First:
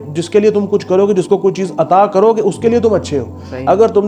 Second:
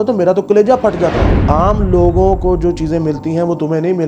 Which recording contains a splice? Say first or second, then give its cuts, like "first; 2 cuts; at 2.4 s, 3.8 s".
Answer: second; 1 cut; at 1.3 s